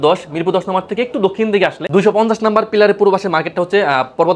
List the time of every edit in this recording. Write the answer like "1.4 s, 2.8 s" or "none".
1.8 s